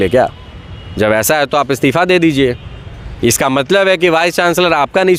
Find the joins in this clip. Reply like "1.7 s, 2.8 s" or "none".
none